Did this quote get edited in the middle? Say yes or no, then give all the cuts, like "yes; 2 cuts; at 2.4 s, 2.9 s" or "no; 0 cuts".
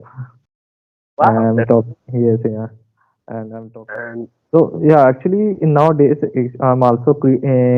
yes; 1 cut; at 3.5 s